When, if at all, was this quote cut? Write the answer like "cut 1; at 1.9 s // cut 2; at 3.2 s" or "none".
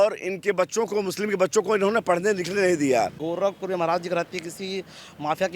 cut 1; at 3.2 s